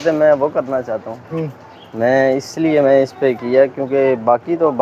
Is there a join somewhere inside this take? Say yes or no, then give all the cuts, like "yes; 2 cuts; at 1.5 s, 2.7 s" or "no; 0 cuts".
no; 0 cuts